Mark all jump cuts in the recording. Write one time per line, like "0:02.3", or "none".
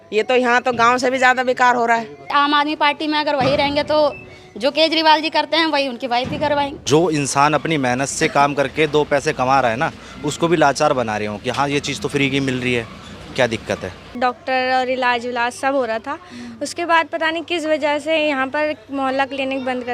0:02.3
0:06.8
0:14.2